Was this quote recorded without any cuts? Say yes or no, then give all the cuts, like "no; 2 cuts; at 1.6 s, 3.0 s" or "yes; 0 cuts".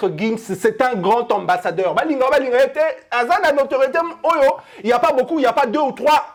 yes; 0 cuts